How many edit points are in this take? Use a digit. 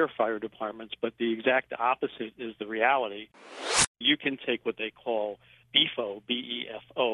3